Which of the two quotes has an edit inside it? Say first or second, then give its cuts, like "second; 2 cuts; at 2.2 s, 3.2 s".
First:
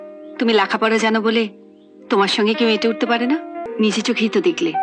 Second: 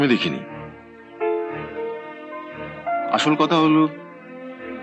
first; 1 cut; at 3.6 s